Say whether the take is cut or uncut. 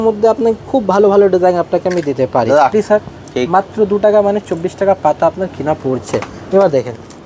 cut